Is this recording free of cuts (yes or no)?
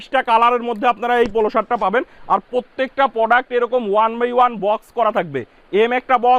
yes